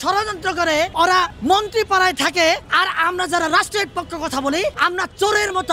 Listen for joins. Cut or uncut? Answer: cut